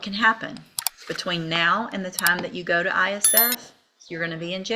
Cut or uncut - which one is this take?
uncut